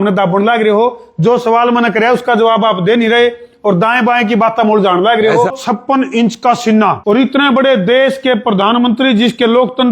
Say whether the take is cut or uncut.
cut